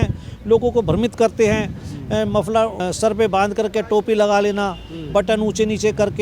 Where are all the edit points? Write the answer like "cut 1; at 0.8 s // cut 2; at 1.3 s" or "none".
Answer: cut 1; at 2.8 s